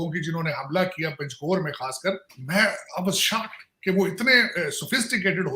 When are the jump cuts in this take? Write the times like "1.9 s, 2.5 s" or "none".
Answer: 2.3 s

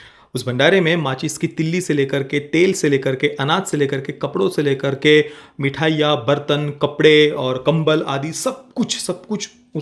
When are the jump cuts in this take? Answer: none

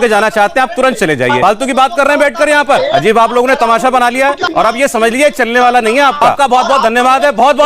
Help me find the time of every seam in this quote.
1.3 s, 2.8 s, 4.4 s, 6.3 s

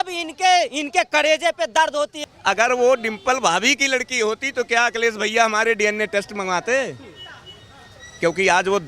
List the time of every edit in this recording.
2.2 s

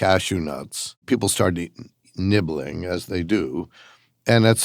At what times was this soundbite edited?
1.0 s

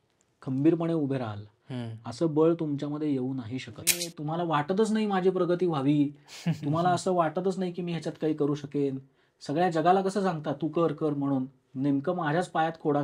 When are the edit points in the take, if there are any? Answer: 4.1 s

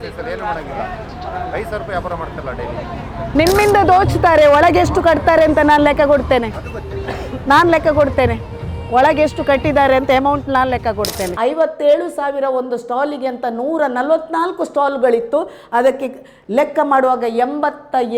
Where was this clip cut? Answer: 3.2 s, 11.2 s

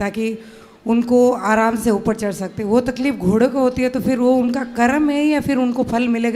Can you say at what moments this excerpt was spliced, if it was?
none

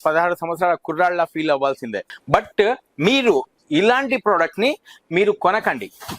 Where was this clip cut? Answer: 2.1 s

